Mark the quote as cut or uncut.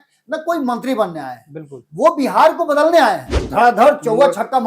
cut